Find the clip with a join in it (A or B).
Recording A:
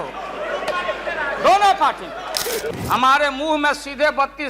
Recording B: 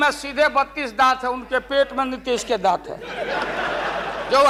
A